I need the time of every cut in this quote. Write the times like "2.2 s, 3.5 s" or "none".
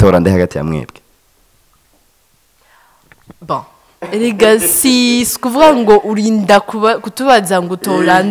none